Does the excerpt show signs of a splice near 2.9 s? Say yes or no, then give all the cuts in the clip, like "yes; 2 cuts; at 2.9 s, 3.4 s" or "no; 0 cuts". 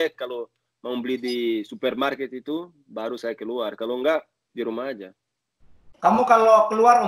no; 0 cuts